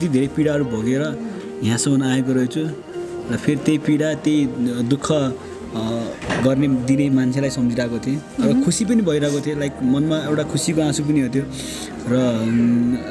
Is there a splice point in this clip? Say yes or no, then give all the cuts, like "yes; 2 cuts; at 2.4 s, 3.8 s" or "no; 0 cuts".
no; 0 cuts